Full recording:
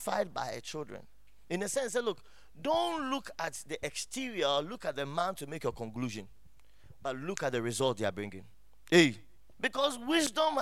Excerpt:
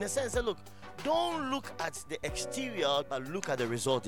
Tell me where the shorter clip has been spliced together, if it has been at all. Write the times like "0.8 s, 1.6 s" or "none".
3.1 s